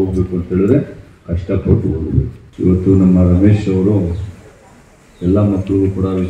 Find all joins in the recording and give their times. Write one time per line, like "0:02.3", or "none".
0:02.4